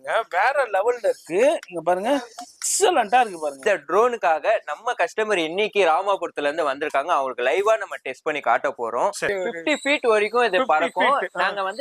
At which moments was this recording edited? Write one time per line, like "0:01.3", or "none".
0:03.6
0:09.3